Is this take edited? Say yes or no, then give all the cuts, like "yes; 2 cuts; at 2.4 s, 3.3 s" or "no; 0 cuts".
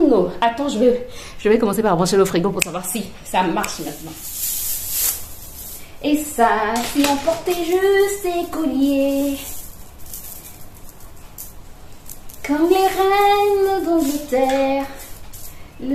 yes; 1 cut; at 4.1 s